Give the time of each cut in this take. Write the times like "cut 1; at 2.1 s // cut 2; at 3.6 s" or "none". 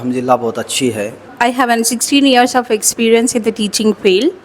cut 1; at 1.3 s